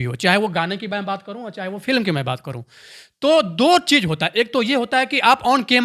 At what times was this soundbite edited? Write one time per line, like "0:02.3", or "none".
none